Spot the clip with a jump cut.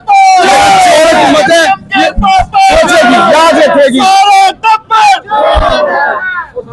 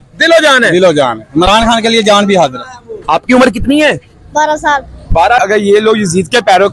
second; 1 cut; at 5.4 s

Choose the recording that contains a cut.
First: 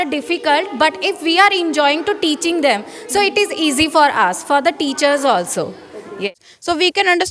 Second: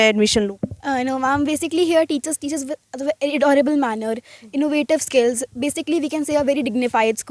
first; 1 cut; at 6.3 s

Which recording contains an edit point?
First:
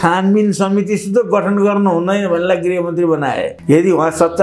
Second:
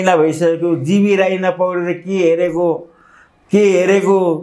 first; 1 cut; at 3.5 s

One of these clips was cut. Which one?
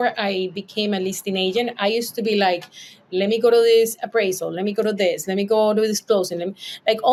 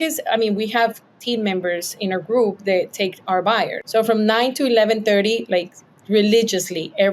second; 1 cut; at 3.8 s

